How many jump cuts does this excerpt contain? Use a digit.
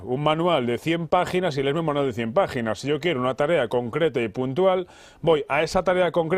0